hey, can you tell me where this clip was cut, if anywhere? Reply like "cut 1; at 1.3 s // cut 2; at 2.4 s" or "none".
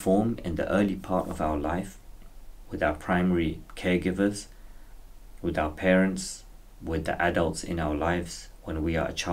none